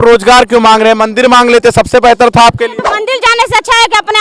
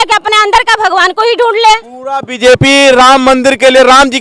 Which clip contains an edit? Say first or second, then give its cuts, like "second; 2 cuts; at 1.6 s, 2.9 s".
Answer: first; 1 cut; at 2.9 s